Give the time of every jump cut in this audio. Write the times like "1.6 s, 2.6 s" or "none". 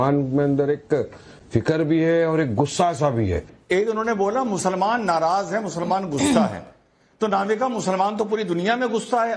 3.5 s

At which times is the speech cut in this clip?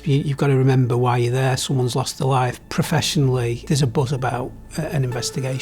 2.6 s, 3.6 s

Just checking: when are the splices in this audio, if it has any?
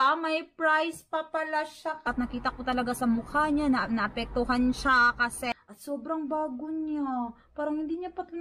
2.1 s, 5.5 s

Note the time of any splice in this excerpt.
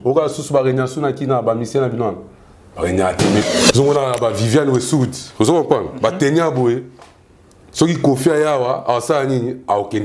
3.4 s

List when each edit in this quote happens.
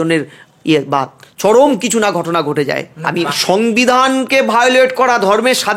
3.1 s

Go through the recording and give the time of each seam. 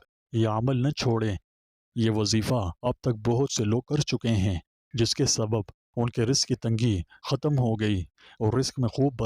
1.5 s

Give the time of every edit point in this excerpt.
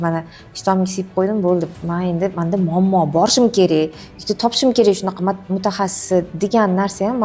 none

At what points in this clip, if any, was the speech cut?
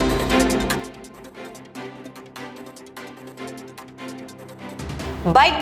0.8 s, 2.7 s, 4.4 s

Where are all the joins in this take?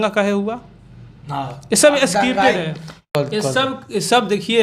3.1 s

